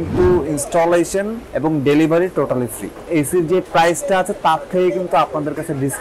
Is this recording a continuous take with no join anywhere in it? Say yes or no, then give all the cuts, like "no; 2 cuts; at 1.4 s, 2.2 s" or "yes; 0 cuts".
no; 2 cuts; at 1.4 s, 3.0 s